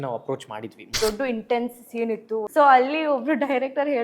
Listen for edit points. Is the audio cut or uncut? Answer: cut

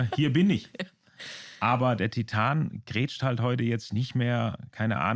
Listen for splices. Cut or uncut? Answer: uncut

